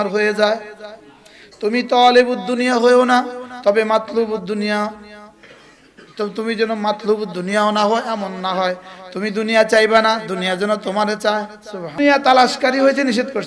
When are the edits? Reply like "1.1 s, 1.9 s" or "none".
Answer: 12.0 s